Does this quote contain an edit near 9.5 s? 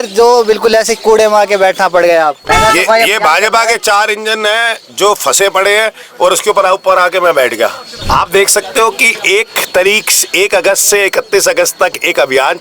no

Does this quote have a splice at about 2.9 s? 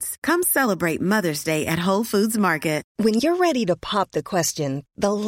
yes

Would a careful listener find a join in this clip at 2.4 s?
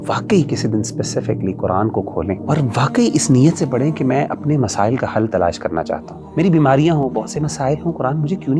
yes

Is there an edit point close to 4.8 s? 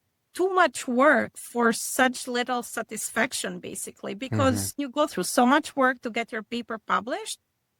yes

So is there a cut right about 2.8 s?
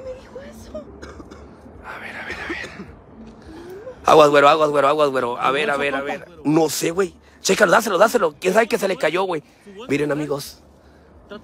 no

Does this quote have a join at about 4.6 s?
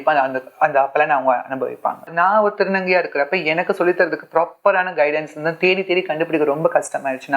no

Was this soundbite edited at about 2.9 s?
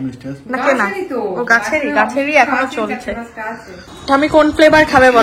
no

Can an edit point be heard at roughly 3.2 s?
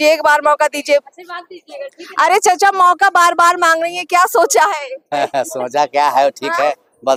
no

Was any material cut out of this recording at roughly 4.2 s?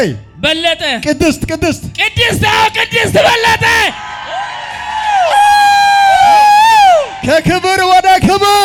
no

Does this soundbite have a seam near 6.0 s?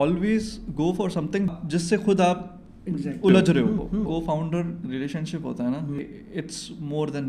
yes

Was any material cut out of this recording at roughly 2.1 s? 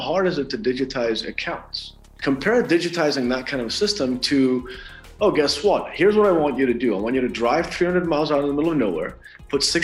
yes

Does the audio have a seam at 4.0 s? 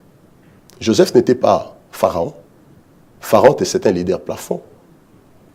no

